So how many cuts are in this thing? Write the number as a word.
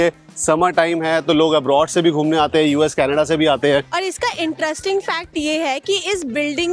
one